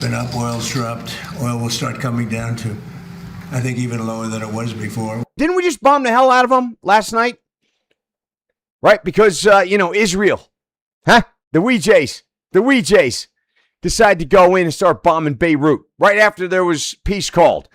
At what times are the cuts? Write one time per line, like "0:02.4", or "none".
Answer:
0:05.4